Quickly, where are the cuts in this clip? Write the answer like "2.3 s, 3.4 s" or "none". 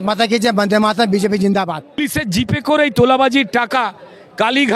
2.1 s